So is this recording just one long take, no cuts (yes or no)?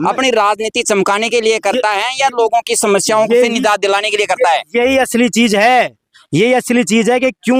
yes